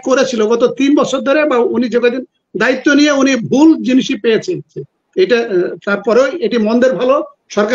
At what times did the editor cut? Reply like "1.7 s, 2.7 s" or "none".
4.7 s